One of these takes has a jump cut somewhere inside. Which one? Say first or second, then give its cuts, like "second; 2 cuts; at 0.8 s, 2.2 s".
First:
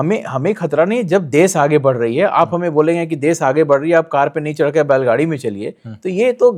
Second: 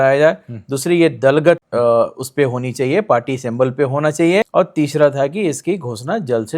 second; 2 cuts; at 1.7 s, 4.5 s